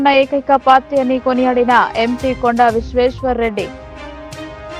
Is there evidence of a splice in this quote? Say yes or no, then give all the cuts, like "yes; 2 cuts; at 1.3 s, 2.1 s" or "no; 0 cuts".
yes; 1 cut; at 3.8 s